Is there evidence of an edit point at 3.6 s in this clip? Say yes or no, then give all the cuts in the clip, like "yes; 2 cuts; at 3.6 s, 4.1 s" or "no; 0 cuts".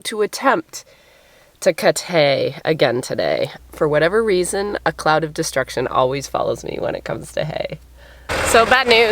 yes; 2 cuts; at 3.6 s, 8.3 s